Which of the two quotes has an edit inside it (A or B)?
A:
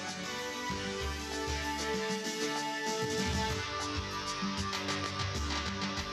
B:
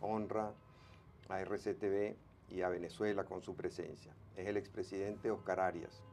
A